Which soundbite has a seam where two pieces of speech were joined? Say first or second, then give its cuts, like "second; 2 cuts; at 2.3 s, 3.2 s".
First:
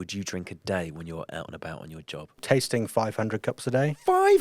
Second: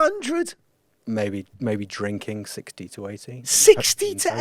first; 1 cut; at 2.4 s